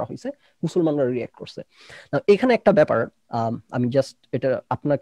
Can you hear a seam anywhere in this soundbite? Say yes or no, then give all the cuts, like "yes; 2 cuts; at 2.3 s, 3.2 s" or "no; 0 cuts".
no; 0 cuts